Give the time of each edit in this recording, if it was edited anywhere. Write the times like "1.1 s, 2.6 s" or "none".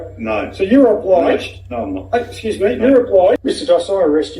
3.4 s